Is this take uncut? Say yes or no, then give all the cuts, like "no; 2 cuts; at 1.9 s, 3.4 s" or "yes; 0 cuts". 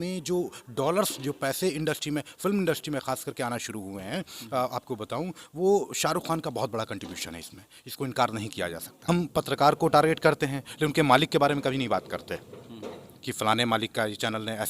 no; 1 cut; at 8.9 s